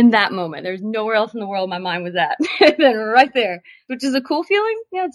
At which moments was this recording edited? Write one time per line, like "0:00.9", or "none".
0:03.9